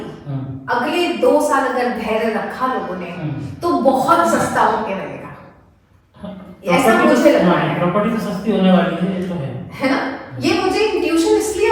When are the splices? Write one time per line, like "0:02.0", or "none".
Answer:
none